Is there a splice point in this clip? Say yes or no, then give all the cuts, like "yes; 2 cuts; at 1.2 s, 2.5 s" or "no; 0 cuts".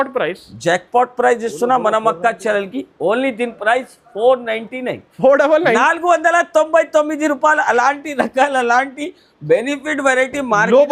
no; 0 cuts